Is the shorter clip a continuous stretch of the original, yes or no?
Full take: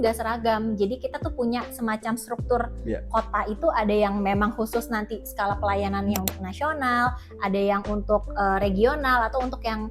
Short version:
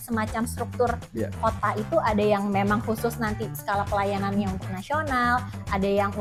yes